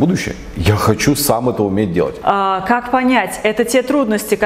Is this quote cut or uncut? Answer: cut